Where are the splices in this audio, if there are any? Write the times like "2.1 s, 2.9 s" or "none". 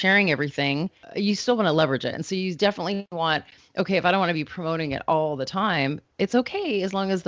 1.0 s